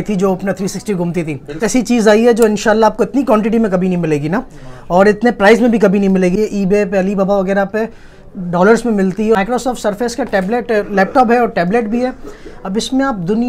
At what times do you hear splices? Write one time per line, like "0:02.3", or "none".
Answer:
0:01.6
0:06.4
0:09.4